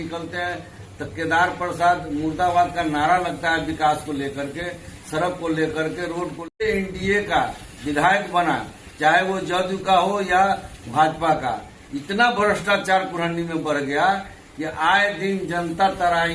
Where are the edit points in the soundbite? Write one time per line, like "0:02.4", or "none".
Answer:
0:06.6